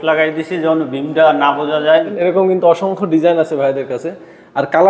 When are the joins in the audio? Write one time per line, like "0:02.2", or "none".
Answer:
0:02.2